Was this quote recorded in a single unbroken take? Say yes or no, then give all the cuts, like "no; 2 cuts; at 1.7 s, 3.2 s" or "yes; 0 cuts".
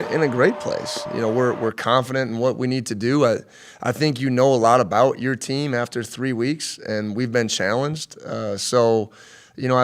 no; 1 cut; at 1.0 s